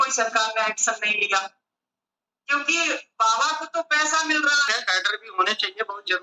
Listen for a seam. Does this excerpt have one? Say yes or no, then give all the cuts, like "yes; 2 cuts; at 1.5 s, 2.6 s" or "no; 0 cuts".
yes; 1 cut; at 4.7 s